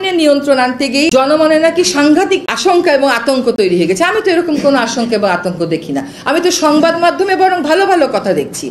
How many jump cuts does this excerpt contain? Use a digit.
2